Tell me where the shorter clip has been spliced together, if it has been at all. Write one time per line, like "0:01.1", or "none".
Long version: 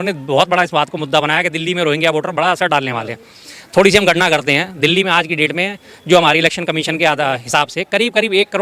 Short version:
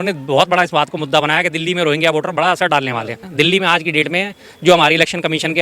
0:03.2